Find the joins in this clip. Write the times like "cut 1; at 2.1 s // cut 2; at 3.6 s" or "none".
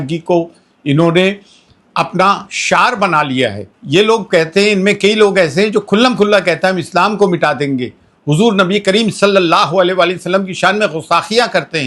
cut 1; at 3.7 s